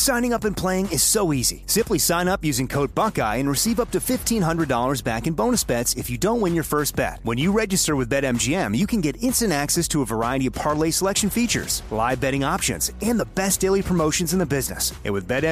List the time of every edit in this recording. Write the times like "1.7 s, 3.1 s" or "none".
none